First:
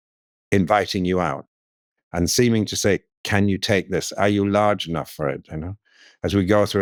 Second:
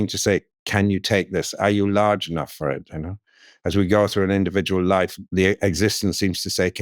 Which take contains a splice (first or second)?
second